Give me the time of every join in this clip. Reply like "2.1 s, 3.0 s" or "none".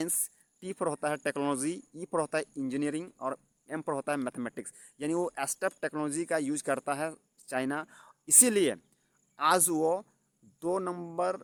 none